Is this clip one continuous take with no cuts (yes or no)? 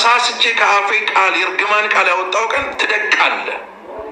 yes